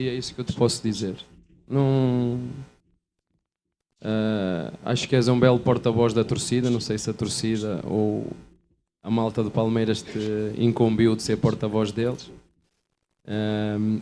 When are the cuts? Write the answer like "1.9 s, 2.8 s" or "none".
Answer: none